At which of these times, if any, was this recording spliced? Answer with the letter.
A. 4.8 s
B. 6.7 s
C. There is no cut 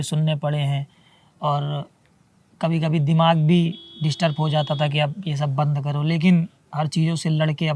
C